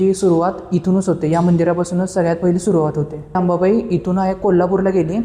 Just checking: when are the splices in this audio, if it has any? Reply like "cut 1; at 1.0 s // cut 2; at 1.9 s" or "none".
cut 1; at 3.4 s